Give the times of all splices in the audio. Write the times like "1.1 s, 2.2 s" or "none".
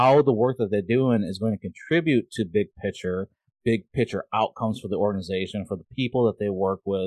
none